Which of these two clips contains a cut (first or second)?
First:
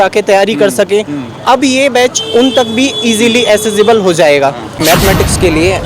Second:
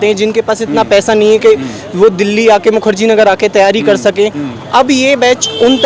first